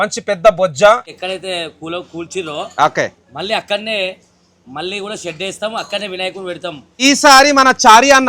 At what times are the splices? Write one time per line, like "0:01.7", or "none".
0:01.1
0:07.0